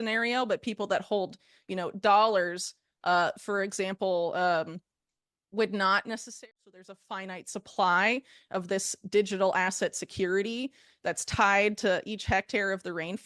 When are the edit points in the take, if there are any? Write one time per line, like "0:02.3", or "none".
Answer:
0:06.4